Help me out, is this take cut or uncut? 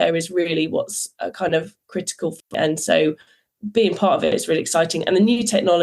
cut